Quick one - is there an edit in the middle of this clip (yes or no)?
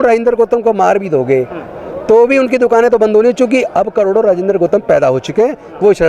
no